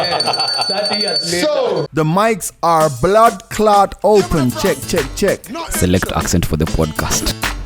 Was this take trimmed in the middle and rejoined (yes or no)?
yes